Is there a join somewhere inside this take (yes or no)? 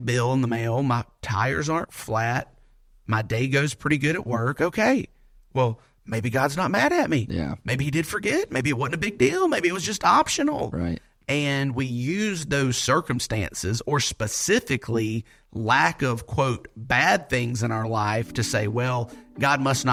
no